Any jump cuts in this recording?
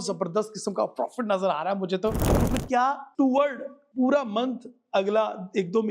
yes; 1 cut; at 2.3 s

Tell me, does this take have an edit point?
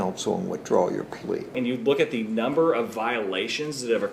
yes; 1 cut; at 1.5 s

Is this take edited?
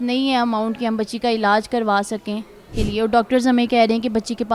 yes; 1 cut; at 2.7 s

